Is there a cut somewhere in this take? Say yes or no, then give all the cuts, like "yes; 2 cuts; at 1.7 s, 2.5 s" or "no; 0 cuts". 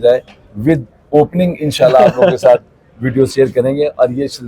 no; 0 cuts